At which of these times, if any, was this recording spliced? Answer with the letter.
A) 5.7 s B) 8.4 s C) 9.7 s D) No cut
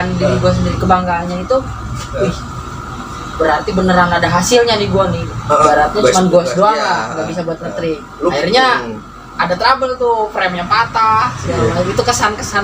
A